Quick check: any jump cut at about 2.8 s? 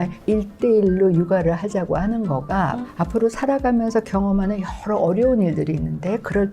yes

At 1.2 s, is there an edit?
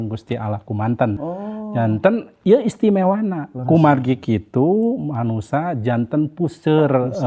yes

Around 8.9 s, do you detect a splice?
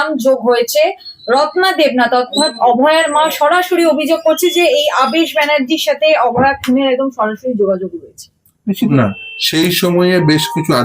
yes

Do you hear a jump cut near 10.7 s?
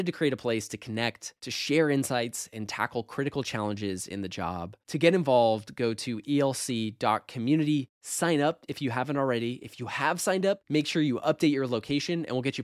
no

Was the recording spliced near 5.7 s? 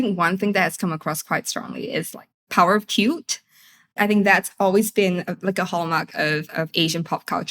no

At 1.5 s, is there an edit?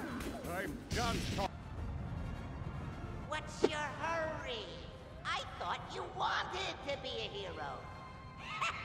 yes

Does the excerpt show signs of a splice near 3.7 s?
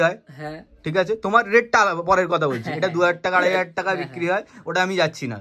no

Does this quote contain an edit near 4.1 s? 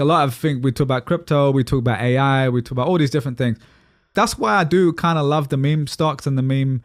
yes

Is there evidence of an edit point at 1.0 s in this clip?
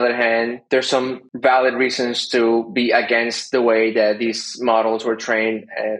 yes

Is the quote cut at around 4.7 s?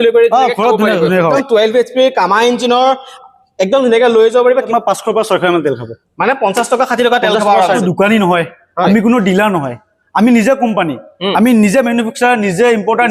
yes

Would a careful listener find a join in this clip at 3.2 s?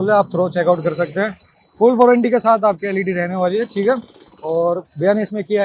no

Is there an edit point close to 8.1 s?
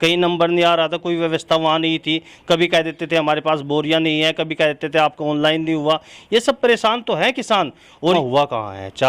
yes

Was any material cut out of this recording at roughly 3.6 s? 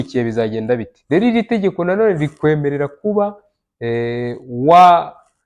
no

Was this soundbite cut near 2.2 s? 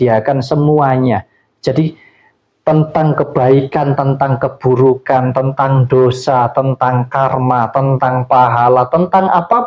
no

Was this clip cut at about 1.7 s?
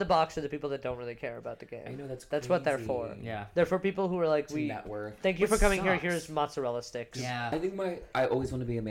no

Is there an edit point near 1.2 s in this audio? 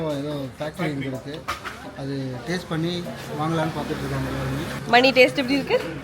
no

